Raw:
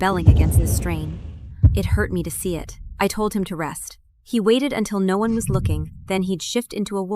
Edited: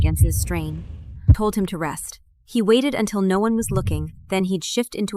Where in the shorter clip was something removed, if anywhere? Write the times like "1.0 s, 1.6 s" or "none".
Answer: 1.4 s